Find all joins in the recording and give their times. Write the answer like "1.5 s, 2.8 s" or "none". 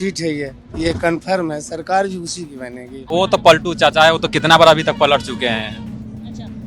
2.9 s